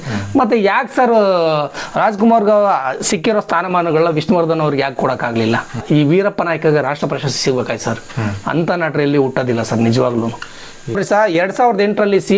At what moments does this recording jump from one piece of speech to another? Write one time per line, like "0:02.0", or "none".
0:05.8
0:11.0